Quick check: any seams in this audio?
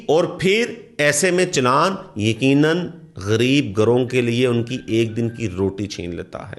no; 0 cuts

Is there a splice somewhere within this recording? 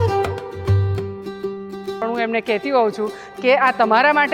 yes; 1 cut; at 2.0 s

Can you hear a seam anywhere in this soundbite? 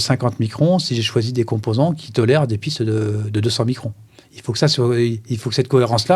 no; 0 cuts

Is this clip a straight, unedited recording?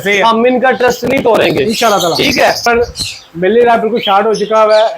no; 1 cut; at 2.6 s

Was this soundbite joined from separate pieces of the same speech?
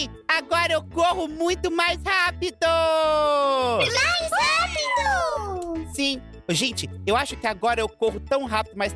no; 0 cuts

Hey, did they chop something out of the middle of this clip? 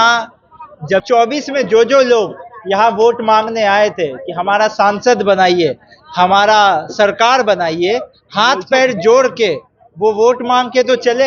yes; 1 cut; at 1.0 s

